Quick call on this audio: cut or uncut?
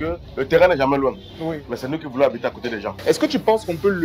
cut